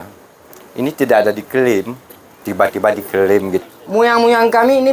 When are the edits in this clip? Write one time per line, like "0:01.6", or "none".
0:03.6